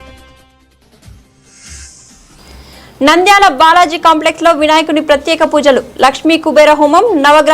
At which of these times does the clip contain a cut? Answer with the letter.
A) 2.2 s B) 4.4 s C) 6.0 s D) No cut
A